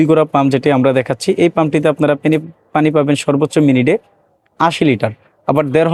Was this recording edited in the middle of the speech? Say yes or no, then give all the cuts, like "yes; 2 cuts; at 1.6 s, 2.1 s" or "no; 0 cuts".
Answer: no; 0 cuts